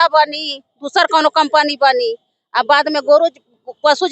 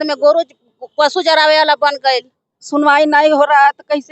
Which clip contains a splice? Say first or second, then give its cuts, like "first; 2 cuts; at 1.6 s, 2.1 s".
second; 1 cut; at 2.5 s